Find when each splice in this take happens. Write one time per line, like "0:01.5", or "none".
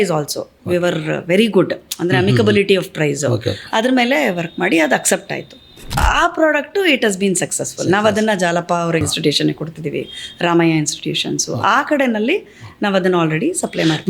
0:06.0

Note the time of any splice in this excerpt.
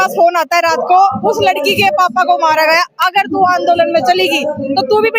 none

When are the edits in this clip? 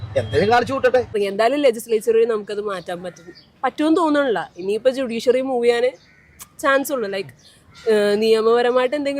0:01.1

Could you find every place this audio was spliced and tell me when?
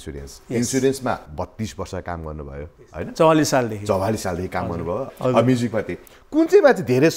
0:05.1

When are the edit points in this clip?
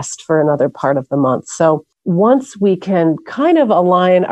0:01.9

